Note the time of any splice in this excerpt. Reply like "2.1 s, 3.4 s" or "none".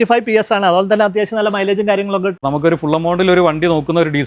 2.4 s